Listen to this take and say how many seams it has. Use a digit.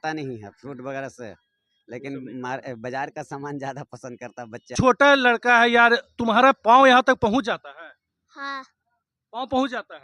1